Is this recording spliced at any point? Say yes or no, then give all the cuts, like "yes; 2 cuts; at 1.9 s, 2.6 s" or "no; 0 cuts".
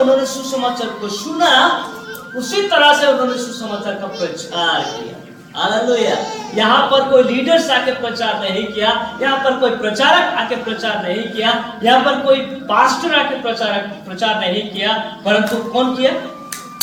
no; 0 cuts